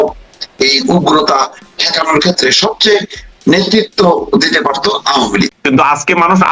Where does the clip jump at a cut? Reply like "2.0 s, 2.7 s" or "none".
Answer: 5.5 s